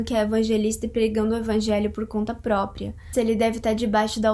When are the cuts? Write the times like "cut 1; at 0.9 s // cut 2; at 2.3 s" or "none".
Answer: cut 1; at 3.1 s